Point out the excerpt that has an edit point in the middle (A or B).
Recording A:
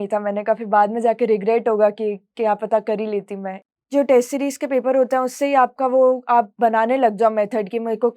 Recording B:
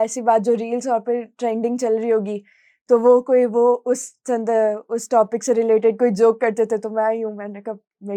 A